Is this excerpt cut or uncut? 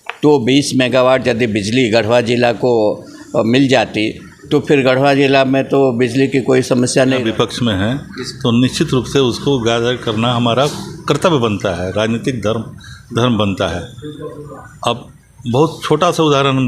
cut